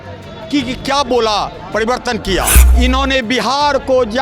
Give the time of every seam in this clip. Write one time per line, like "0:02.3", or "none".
0:02.6